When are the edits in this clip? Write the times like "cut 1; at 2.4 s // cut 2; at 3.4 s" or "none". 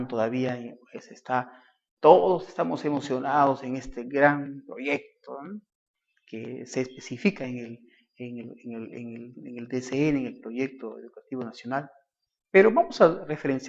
none